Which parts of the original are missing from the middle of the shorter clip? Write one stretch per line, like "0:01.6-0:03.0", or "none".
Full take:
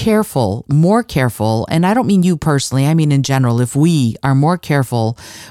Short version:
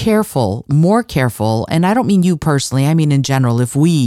none